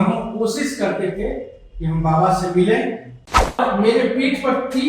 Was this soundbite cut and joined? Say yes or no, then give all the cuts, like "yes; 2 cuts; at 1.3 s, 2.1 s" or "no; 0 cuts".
yes; 1 cut; at 3.6 s